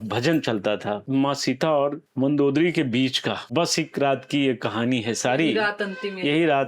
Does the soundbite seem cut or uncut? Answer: cut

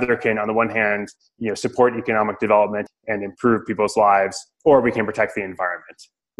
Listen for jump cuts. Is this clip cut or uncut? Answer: cut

